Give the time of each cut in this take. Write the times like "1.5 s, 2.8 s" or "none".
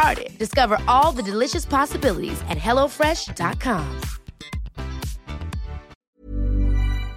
6.0 s